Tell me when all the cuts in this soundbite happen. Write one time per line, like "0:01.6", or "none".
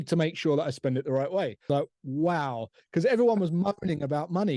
0:01.7

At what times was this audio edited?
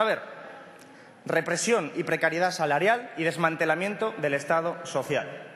0:02.6

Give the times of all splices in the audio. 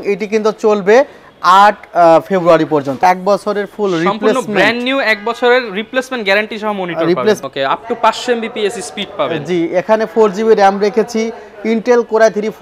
0:03.0
0:07.4

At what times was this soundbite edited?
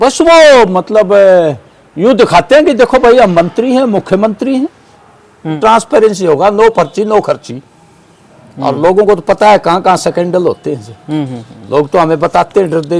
0:05.6

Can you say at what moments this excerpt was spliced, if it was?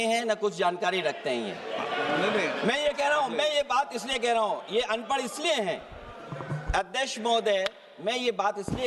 none

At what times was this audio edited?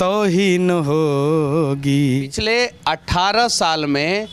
0:02.3

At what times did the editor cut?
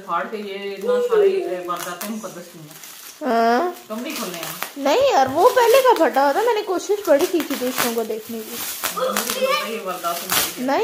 none

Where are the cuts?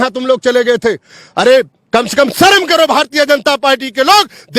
none

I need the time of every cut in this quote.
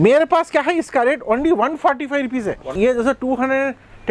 0:02.8

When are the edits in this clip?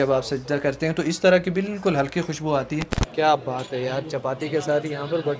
0:03.0

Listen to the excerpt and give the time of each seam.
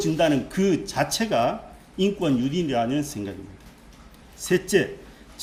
none

